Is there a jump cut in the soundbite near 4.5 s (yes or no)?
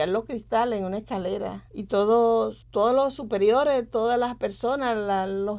no